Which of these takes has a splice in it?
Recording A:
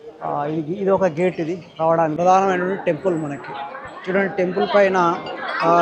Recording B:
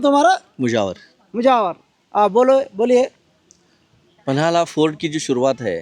A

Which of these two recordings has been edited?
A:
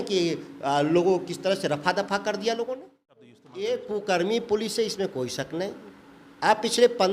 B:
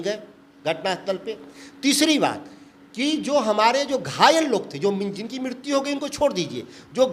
A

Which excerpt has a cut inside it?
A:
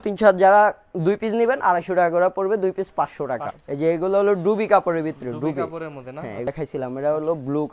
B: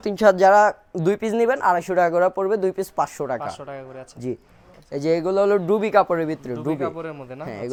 A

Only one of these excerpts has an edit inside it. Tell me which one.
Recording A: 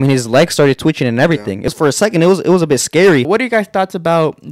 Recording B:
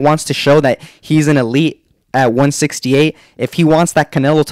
A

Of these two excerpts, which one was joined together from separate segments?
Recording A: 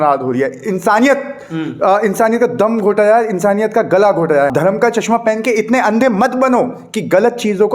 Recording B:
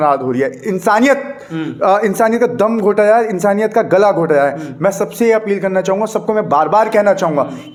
A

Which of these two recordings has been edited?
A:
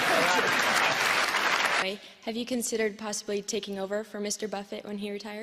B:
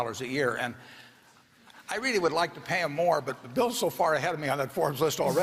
A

